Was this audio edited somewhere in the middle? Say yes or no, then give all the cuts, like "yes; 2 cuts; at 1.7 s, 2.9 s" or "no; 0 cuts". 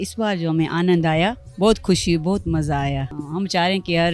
yes; 2 cuts; at 1.5 s, 3.1 s